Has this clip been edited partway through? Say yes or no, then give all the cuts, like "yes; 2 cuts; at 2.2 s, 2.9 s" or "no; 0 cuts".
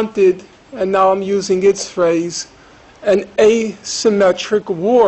no; 0 cuts